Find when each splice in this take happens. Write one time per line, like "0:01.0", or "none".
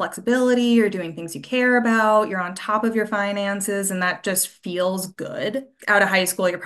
0:05.7